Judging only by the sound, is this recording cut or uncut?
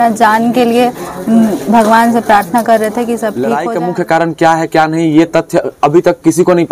cut